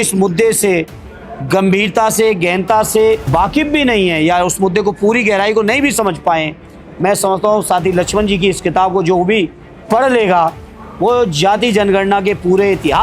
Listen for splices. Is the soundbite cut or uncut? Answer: cut